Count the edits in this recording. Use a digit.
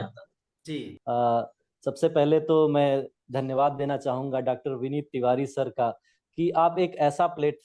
1